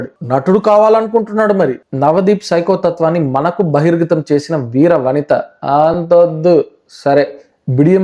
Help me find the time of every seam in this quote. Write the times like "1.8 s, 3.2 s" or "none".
1.8 s